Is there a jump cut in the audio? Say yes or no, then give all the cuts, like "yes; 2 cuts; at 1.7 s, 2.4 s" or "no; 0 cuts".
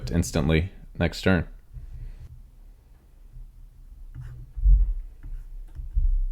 yes; 1 cut; at 2.3 s